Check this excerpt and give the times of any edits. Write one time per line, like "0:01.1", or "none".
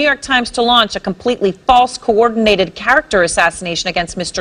none